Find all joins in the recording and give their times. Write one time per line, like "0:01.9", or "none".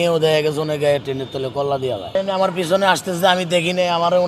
0:02.1